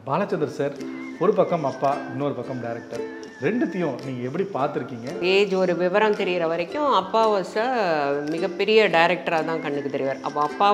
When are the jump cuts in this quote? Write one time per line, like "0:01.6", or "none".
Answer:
0:05.2

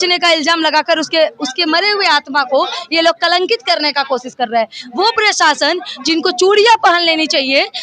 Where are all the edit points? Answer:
none

